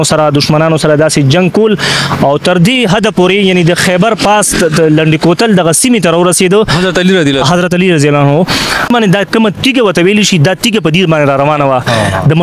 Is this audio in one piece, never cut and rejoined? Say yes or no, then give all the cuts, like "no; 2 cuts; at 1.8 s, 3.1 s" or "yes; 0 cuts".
no; 1 cut; at 8.9 s